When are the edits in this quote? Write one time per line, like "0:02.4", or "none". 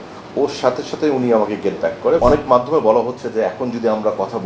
0:02.2